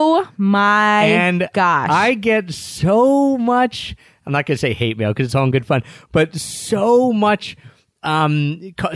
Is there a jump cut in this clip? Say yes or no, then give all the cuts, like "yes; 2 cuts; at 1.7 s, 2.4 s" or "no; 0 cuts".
no; 0 cuts